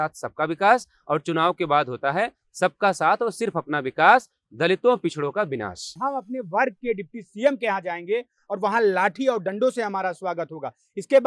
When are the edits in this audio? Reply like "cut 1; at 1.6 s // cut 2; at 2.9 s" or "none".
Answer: cut 1; at 6.0 s

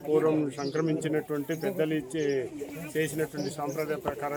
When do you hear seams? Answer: none

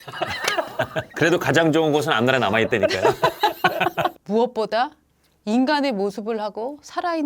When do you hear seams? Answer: cut 1; at 1.1 s // cut 2; at 4.2 s

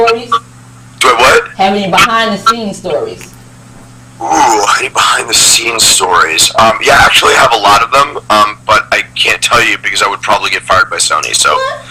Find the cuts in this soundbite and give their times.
cut 1; at 5.2 s

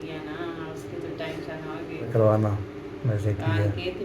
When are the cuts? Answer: cut 1; at 2.1 s

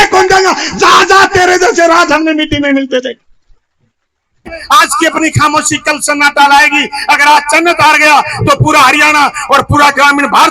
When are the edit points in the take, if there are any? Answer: cut 1; at 4.6 s

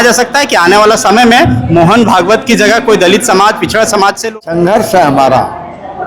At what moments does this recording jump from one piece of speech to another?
cut 1; at 4.2 s

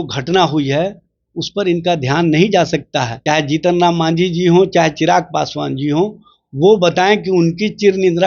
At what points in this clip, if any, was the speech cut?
cut 1; at 3.1 s

